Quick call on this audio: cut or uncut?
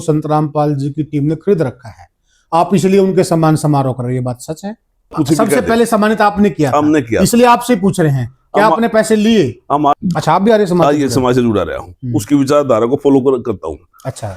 cut